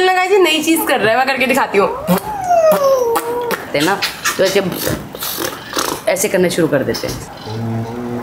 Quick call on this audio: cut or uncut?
cut